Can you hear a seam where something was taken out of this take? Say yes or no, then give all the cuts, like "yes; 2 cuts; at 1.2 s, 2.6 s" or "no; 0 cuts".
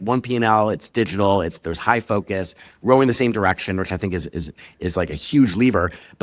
no; 0 cuts